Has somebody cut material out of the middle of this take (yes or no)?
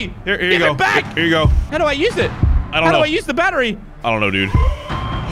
no